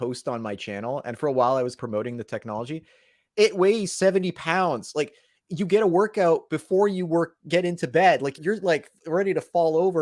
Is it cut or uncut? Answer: cut